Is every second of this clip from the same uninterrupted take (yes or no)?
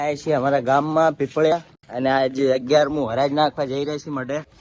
no